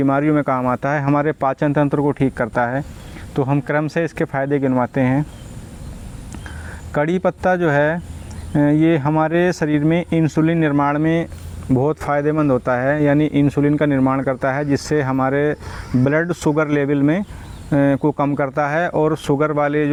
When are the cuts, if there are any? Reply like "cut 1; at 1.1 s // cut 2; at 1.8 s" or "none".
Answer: none